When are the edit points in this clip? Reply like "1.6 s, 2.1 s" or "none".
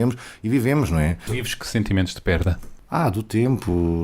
1.3 s, 2.7 s

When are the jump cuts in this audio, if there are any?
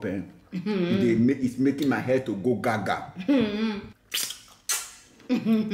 3.9 s

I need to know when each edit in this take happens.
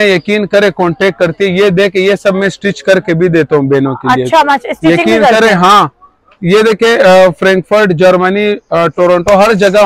none

